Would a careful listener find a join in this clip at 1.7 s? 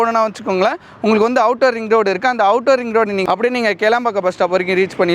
no; 1 cut; at 3.4 s

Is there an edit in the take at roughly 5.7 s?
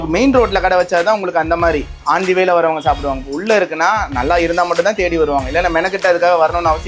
no; 1 cut; at 1.9 s

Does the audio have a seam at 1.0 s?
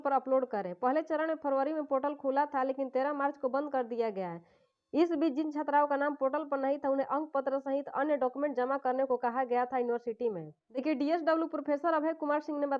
no; 0 cuts

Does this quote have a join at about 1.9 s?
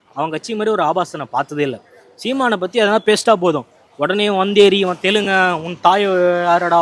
no; 0 cuts

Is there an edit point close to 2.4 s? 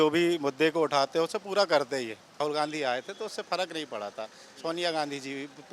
yes; 1 cut; at 2.4 s

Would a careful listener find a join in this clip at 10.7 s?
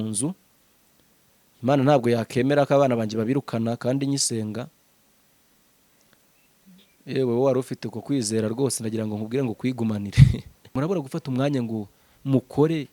yes; 1 cut; at 10.7 s

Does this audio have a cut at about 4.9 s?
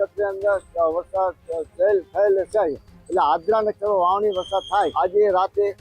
yes; 1 cut; at 4.9 s

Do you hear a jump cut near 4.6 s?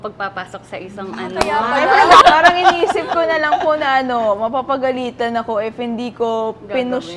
no; 1 cut; at 2.2 s

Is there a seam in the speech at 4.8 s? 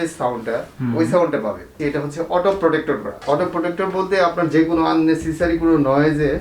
no; 2 cuts; at 1.8 s, 3.1 s

